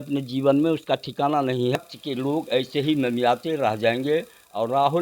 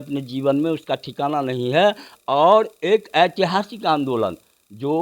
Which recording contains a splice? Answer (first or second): first